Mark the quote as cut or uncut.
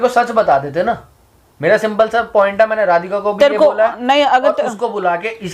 uncut